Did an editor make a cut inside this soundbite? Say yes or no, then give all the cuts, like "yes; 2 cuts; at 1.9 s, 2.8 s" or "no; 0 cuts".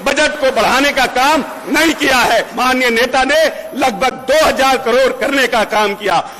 yes; 1 cut; at 2.5 s